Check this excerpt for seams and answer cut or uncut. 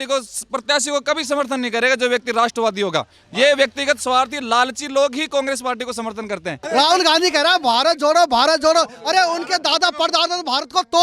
cut